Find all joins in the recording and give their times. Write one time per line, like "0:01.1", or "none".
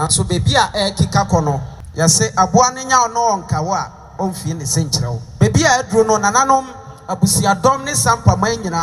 0:01.8
0:05.2